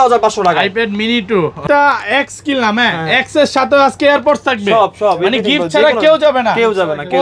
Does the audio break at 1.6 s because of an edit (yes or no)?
yes